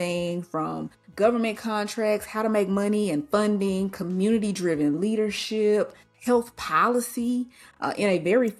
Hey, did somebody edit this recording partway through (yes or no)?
yes